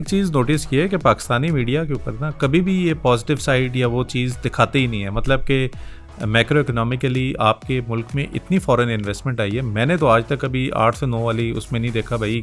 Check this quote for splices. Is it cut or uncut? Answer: uncut